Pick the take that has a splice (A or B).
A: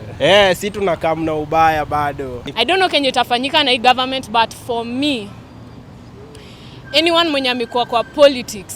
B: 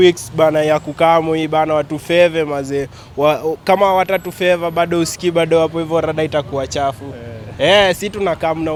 A